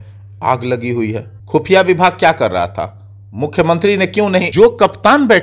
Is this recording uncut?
no; 2 cuts; at 1.3 s, 4.5 s

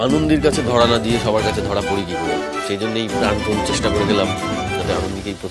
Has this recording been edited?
no; 0 cuts

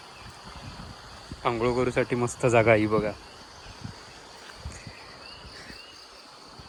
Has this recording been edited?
no; 0 cuts

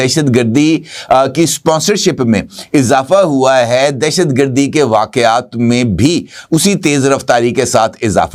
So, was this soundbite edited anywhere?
no; 0 cuts

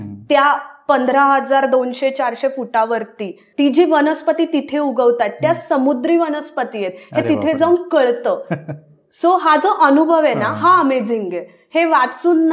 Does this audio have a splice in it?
yes; 1 cut; at 3.4 s

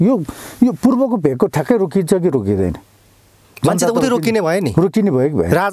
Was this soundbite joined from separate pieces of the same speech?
no; 0 cuts

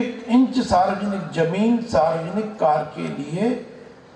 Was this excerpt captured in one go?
yes; 0 cuts

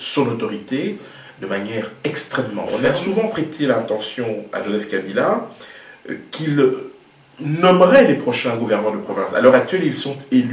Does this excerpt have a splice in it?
yes; 1 cut; at 3.3 s

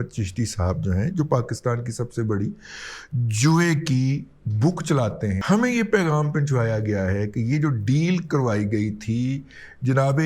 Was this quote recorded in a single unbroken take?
no; 1 cut; at 5.4 s

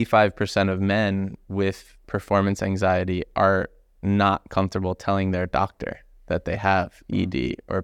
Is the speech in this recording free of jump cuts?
yes; 0 cuts

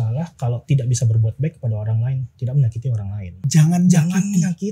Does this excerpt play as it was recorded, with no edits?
no; 1 cut; at 3.4 s

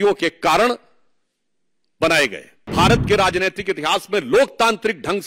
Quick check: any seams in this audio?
yes; 1 cut; at 2.7 s

